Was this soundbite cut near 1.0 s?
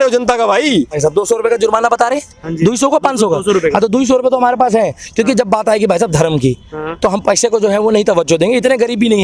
yes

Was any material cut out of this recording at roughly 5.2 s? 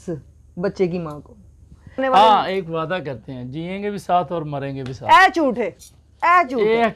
no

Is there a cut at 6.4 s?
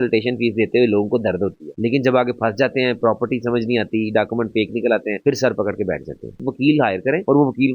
yes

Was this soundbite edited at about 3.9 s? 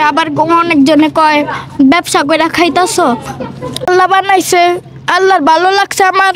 yes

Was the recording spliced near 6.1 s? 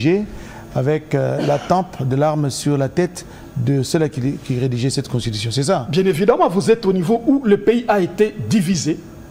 no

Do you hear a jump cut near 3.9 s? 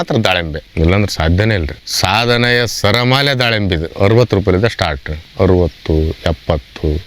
yes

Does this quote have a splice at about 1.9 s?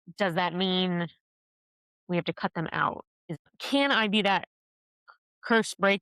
no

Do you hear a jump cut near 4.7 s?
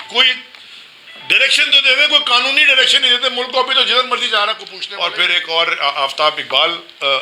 yes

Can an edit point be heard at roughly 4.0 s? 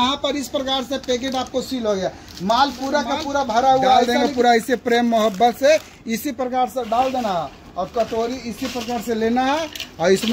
yes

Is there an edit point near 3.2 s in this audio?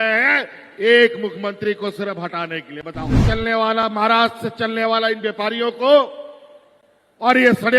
yes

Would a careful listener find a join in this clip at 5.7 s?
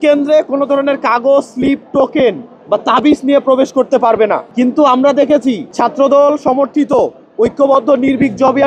yes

